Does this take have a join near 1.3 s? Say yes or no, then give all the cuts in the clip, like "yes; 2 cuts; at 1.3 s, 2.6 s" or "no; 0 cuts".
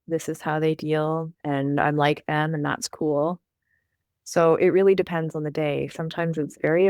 yes; 1 cut; at 1.3 s